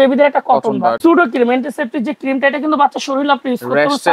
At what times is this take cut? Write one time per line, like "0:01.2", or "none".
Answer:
0:01.0